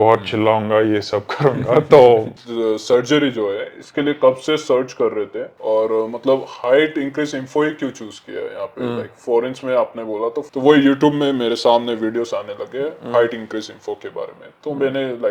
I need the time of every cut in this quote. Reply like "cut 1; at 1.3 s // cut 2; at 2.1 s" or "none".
cut 1; at 2.3 s // cut 2; at 10.4 s